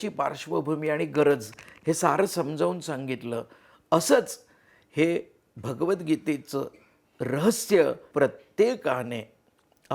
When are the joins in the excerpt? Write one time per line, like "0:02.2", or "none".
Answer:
0:08.1